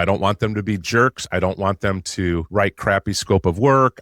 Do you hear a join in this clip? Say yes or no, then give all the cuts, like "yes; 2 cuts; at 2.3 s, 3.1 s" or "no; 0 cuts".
yes; 1 cut; at 3.0 s